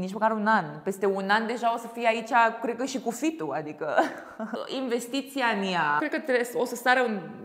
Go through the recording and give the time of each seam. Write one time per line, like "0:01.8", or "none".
0:04.6
0:06.0

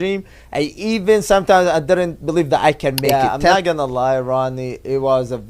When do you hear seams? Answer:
0:03.1

